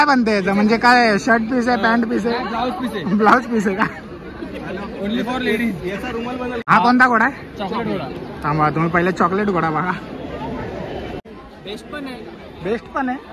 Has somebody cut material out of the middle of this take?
yes; 2 cuts; at 6.6 s, 11.3 s

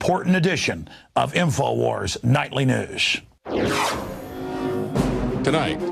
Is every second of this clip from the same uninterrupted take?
yes; 0 cuts

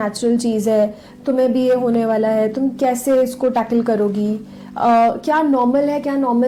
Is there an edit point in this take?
no; 0 cuts

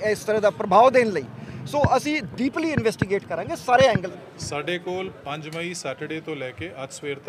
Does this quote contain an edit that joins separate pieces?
yes; 1 cut; at 4.1 s

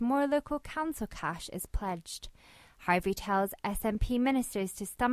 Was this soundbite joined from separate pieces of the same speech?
no; 0 cuts

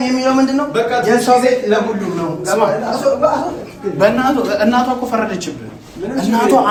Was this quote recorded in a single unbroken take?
yes; 0 cuts

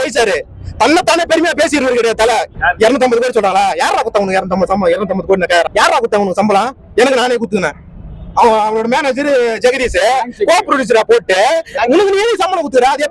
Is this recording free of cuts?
no; 2 cuts; at 2.5 s, 5.7 s

